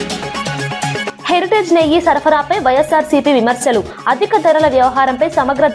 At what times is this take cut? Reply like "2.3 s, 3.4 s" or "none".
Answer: none